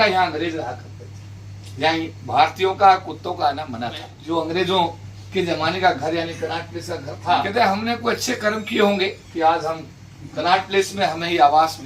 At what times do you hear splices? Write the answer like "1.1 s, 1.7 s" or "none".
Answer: 4.1 s, 7.5 s